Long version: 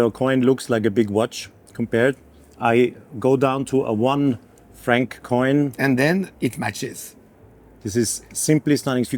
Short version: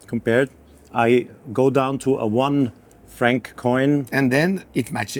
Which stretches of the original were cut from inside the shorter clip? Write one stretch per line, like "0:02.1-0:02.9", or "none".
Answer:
none